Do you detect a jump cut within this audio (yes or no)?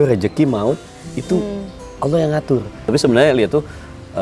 yes